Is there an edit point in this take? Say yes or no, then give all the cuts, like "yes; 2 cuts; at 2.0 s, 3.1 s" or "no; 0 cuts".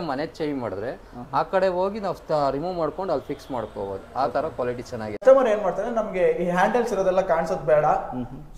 yes; 1 cut; at 5.2 s